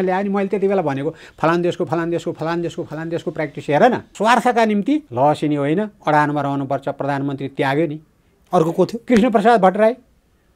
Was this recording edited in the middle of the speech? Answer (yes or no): yes